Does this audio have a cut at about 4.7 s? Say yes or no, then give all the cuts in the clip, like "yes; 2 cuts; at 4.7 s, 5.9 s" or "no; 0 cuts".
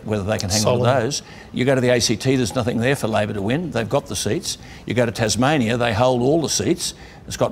yes; 2 cuts; at 1.4 s, 4.7 s